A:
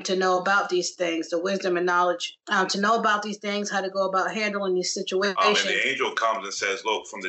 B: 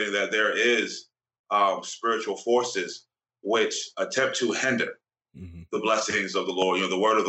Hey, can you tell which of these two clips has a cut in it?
A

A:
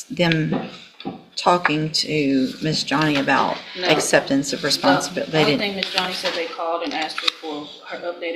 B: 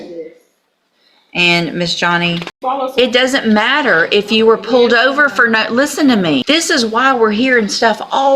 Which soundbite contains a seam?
B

